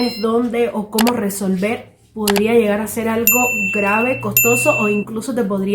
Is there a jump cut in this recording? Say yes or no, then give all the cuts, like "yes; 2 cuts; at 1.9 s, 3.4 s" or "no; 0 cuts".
no; 0 cuts